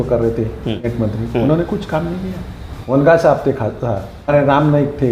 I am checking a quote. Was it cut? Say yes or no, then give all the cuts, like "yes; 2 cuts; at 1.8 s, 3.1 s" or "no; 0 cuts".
yes; 3 cuts; at 0.9 s, 2.9 s, 4.3 s